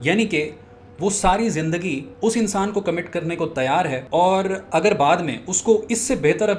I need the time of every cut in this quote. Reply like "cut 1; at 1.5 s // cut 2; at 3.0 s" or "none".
cut 1; at 4.0 s